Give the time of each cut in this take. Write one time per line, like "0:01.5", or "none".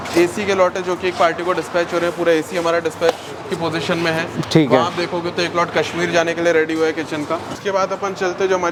none